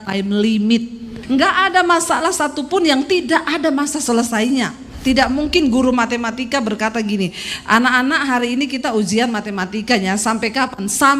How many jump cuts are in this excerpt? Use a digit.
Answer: 2